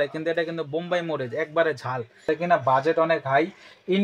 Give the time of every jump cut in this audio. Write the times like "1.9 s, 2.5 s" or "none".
2.3 s